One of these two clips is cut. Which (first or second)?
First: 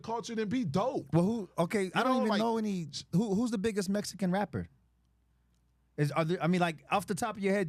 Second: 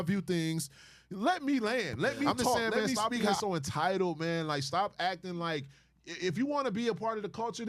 second